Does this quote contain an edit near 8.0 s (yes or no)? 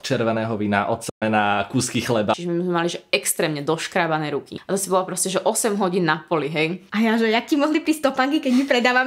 no